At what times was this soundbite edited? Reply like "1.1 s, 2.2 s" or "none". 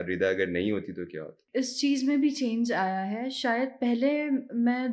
1.4 s